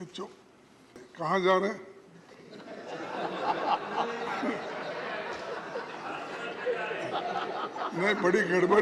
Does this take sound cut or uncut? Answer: cut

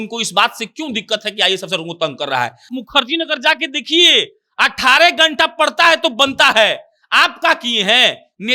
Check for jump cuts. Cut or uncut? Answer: cut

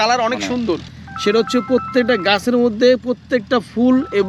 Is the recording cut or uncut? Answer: cut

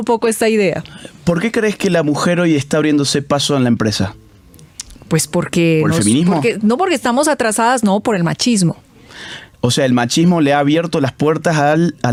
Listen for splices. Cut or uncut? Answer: uncut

